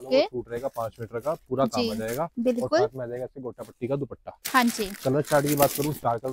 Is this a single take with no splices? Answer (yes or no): yes